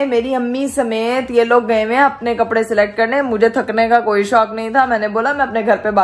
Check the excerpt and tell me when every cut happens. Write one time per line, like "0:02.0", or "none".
none